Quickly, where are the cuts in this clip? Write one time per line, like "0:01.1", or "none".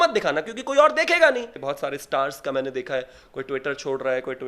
0:01.6